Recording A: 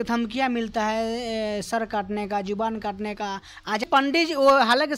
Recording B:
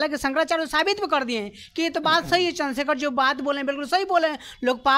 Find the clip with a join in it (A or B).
A